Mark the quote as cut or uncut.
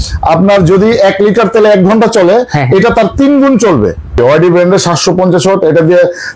cut